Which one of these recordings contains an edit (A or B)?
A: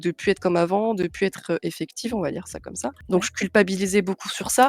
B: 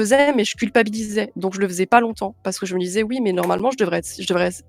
A